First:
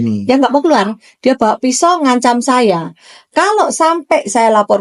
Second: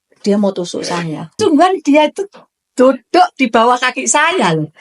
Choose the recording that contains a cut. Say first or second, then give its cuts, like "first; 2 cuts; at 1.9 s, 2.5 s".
second; 1 cut; at 1.4 s